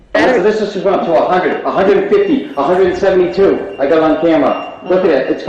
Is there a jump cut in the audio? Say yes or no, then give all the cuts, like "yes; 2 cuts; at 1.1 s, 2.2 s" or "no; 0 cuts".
no; 0 cuts